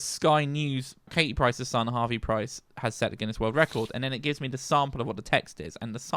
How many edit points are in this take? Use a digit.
1